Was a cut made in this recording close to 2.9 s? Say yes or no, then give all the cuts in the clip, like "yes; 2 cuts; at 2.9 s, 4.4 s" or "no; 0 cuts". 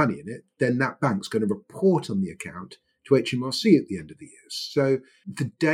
no; 0 cuts